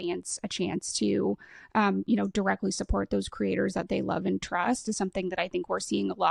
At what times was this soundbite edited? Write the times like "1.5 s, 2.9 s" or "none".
none